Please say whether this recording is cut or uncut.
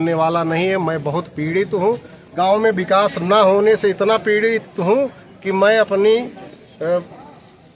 cut